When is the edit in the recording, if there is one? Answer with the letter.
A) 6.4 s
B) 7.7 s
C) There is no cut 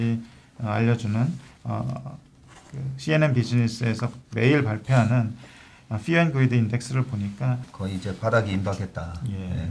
B